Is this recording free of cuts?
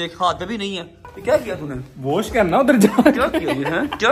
no; 1 cut; at 1.0 s

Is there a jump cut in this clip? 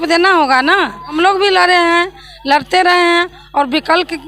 yes; 1 cut; at 1.1 s

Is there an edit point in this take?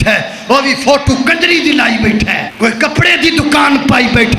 yes; 1 cut; at 2.5 s

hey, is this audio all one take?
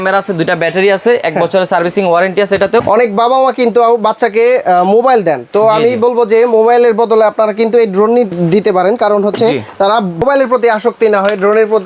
yes; 0 cuts

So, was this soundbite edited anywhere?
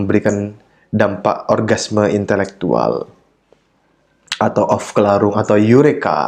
no; 0 cuts

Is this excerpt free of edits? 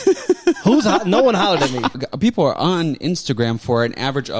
no; 1 cut; at 2.0 s

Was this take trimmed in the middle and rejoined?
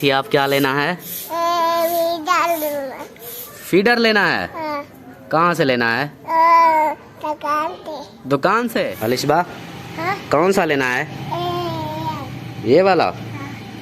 yes; 1 cut; at 8.9 s

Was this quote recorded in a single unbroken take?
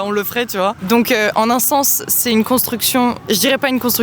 yes; 0 cuts

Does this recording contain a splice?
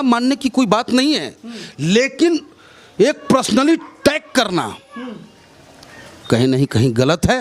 no; 0 cuts

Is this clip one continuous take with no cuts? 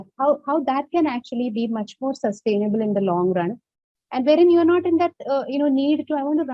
yes; 0 cuts

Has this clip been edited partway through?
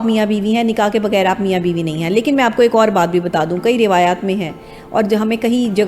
no; 0 cuts

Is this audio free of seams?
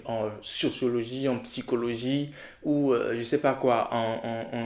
yes; 0 cuts

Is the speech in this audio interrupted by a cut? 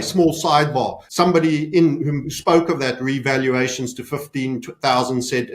yes; 1 cut; at 1.0 s

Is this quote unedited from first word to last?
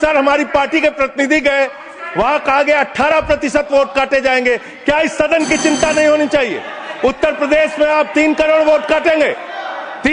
yes; 0 cuts

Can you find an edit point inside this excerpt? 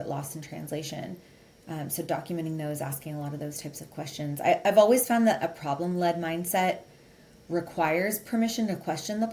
no; 0 cuts

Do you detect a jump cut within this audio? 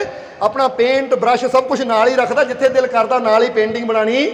no; 0 cuts

